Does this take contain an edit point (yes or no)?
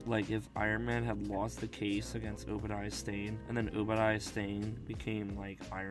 no